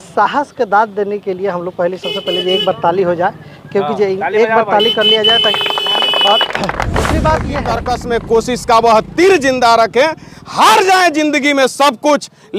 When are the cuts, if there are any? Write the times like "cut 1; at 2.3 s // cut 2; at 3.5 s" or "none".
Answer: cut 1; at 7.8 s